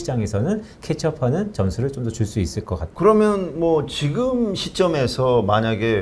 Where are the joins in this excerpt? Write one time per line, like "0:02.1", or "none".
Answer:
0:02.9